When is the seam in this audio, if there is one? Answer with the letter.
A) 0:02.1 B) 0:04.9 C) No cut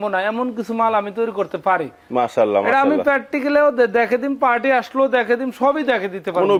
C